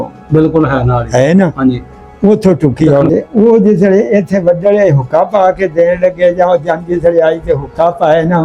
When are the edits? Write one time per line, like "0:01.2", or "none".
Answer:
0:03.1